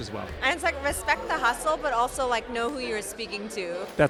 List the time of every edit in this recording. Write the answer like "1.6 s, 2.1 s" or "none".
none